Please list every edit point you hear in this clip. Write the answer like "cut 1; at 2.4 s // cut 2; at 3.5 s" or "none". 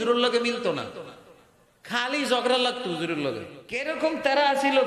cut 1; at 3.6 s